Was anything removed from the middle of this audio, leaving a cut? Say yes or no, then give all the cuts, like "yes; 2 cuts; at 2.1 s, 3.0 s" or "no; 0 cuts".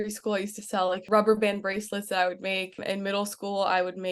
yes; 2 cuts; at 1.0 s, 2.8 s